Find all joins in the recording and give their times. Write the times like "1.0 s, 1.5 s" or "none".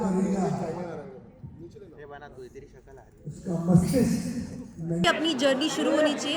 5.0 s